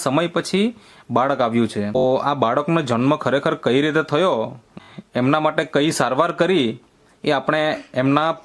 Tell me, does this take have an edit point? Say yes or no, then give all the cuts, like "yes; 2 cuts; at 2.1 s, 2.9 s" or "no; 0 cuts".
yes; 2 cuts; at 2.0 s, 4.7 s